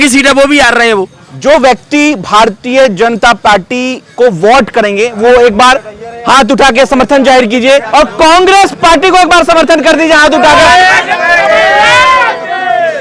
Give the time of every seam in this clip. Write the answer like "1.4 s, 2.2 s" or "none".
1.2 s, 7.9 s